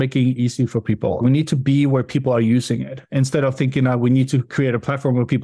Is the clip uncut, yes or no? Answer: yes